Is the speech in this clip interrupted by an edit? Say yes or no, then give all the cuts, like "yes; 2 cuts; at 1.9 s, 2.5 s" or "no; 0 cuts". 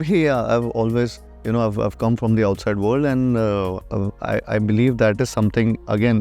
yes; 1 cut; at 3.8 s